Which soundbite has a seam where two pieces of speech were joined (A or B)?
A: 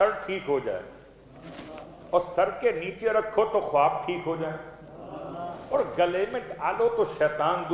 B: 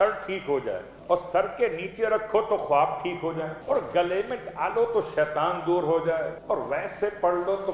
B